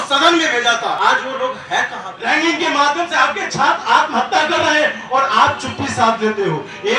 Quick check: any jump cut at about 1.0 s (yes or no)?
yes